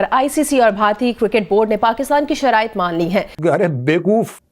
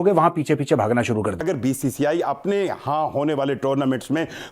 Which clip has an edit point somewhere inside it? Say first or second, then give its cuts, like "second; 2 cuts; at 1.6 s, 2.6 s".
second; 1 cut; at 1.5 s